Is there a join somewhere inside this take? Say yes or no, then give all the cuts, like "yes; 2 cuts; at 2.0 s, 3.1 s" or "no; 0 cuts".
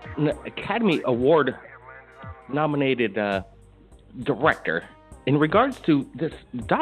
no; 0 cuts